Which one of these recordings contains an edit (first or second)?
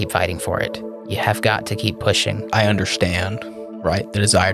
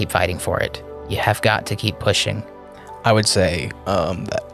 first